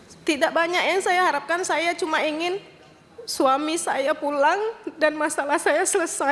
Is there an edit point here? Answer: no; 0 cuts

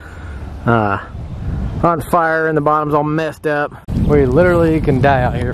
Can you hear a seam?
yes; 1 cut; at 3.8 s

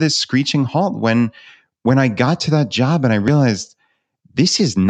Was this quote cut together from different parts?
no; 0 cuts

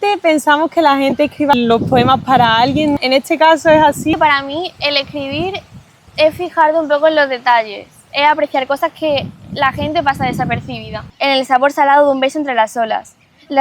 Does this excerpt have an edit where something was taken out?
yes; 3 cuts; at 3.0 s, 4.1 s, 11.0 s

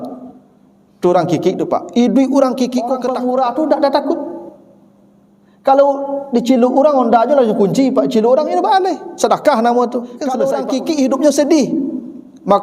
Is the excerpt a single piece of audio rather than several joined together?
no; 2 cuts; at 3.0 s, 10.4 s

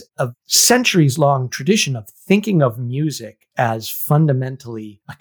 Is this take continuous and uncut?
yes; 0 cuts

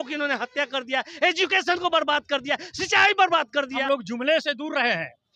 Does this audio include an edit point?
yes; 1 cut; at 3.8 s

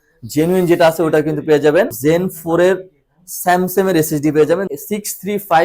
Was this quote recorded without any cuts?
no; 2 cuts; at 1.9 s, 4.7 s

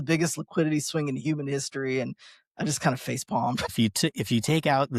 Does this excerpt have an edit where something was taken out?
yes; 1 cut; at 3.7 s

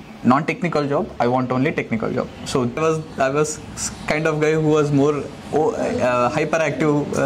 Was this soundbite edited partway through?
yes; 1 cut; at 2.8 s

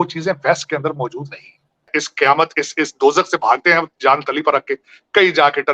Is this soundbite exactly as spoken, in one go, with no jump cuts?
no; 1 cut; at 2.0 s

